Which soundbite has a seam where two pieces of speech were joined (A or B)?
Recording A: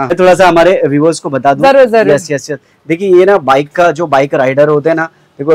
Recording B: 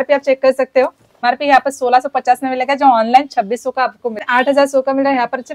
B